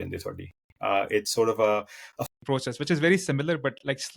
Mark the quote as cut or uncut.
cut